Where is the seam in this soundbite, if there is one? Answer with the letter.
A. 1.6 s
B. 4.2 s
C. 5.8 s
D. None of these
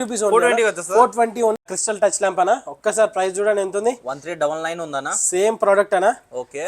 A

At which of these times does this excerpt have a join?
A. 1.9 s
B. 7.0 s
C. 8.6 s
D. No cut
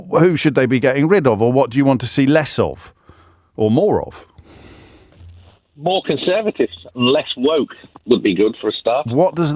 D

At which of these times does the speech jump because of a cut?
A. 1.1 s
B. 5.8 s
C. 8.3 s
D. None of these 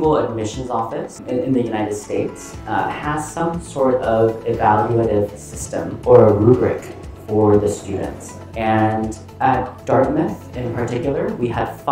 A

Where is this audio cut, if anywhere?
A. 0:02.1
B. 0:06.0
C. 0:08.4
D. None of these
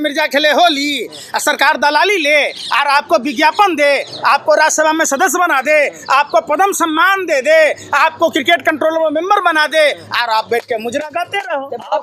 D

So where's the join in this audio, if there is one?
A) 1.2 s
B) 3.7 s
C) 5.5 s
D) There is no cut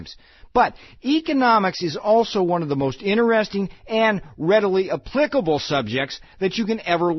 D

